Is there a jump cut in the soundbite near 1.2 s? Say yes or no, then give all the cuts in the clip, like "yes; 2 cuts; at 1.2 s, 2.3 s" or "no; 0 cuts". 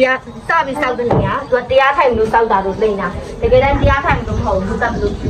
no; 0 cuts